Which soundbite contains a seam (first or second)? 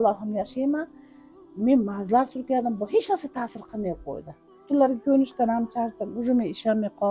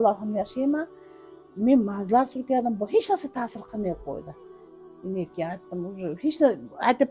first